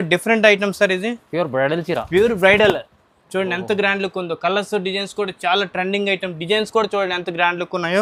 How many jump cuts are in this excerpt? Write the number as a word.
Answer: zero